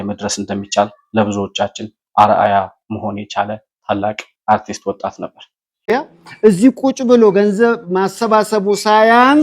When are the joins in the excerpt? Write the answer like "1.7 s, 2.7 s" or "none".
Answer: 5.8 s